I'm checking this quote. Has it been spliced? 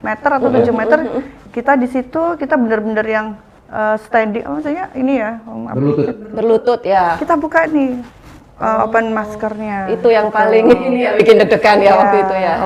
no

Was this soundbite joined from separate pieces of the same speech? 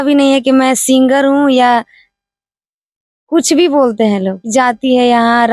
yes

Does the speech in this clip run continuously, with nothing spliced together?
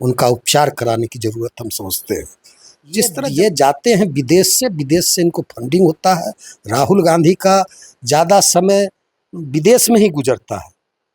no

